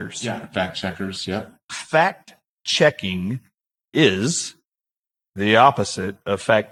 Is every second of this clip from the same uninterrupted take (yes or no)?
yes